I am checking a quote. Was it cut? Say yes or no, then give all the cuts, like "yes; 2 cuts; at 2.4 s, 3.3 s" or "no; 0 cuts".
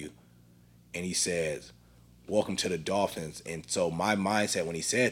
no; 0 cuts